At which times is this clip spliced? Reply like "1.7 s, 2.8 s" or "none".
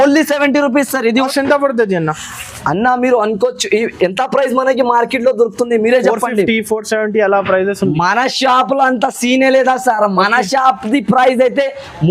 1.3 s